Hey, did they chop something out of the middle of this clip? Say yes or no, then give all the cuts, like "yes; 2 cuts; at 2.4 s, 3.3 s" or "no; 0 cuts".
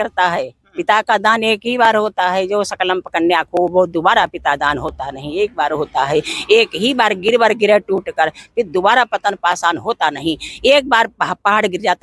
no; 0 cuts